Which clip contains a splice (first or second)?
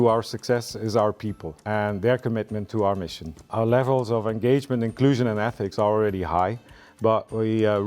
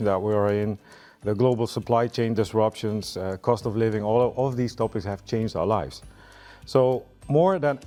first